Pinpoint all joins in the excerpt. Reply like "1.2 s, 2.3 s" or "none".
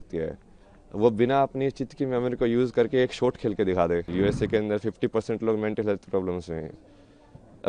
4.1 s